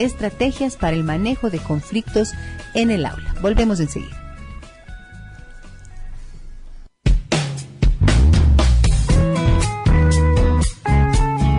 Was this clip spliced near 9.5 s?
yes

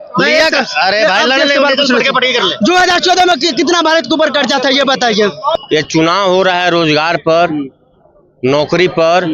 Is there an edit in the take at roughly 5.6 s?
yes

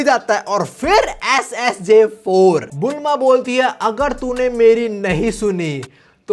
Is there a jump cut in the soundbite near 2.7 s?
yes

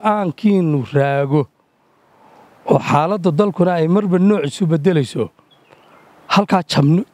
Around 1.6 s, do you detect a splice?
no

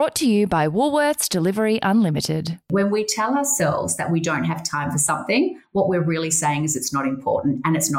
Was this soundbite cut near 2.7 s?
yes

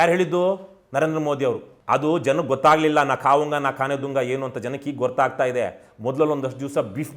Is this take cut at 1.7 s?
yes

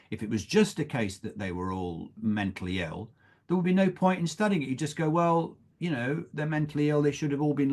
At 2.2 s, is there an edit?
yes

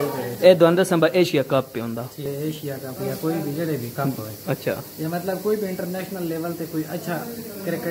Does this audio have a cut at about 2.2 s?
yes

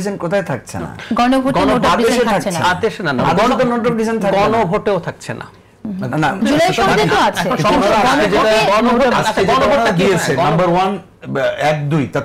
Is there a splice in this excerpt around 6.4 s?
yes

